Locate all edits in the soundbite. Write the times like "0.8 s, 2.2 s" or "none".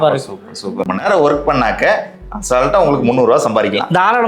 0.9 s